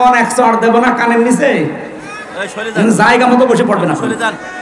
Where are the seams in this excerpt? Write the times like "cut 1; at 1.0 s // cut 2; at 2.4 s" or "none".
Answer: none